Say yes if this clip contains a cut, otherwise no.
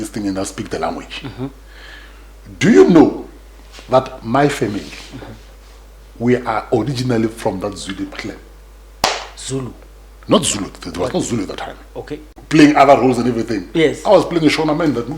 yes